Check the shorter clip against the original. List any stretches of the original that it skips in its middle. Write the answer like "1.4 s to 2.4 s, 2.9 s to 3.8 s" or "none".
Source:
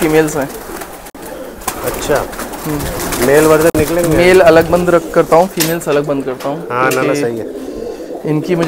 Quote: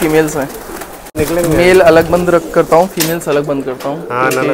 1.2 s to 3.8 s